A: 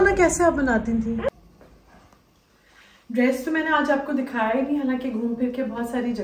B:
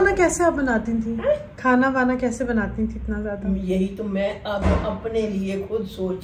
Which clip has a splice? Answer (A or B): A